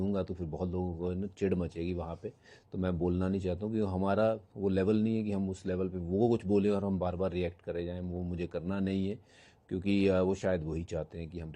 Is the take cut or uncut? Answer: uncut